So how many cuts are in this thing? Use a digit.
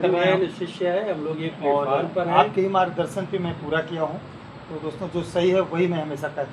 0